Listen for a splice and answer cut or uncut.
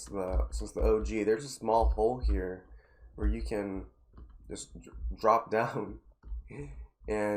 uncut